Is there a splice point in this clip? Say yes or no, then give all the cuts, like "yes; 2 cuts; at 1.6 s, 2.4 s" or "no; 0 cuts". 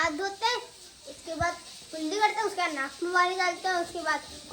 no; 0 cuts